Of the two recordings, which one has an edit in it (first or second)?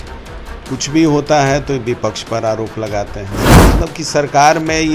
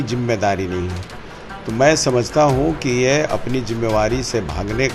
first